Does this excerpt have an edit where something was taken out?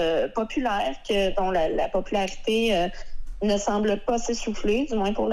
no; 0 cuts

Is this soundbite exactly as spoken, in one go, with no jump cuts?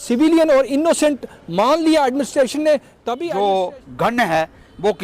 no; 1 cut; at 2.9 s

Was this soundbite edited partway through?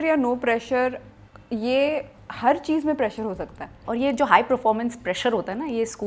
yes; 1 cut; at 3.8 s

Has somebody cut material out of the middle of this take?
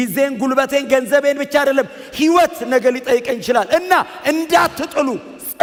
no; 0 cuts

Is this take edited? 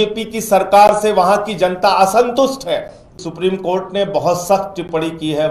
yes; 1 cut; at 3.2 s

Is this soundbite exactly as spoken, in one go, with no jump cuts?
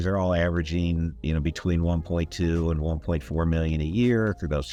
yes; 0 cuts

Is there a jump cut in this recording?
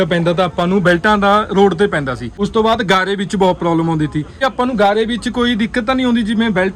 yes; 2 cuts; at 2.2 s, 4.4 s

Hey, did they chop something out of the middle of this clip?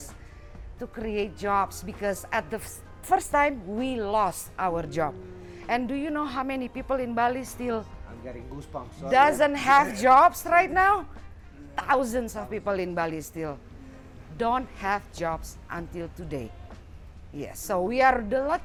no; 0 cuts

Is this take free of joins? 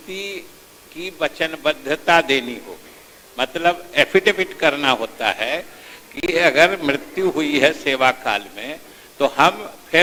yes; 0 cuts

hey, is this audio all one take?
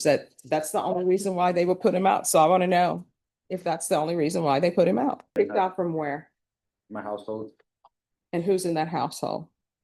no; 1 cut; at 5.4 s

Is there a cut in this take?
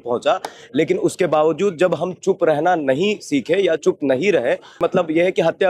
yes; 1 cut; at 4.8 s

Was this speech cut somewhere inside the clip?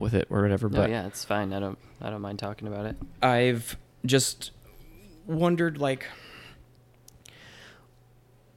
no; 0 cuts

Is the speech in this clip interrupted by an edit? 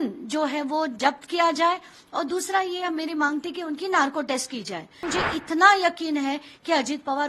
yes; 1 cut; at 5.0 s

